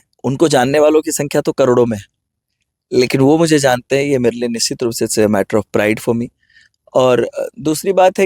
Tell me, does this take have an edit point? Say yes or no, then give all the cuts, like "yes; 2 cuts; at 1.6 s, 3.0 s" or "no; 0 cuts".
no; 0 cuts